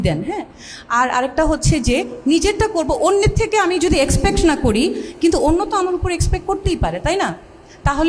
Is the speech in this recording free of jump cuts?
yes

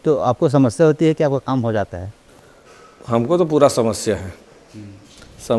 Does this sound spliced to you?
no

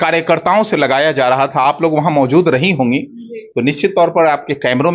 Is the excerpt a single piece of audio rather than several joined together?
yes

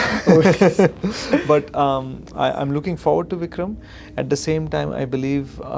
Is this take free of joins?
yes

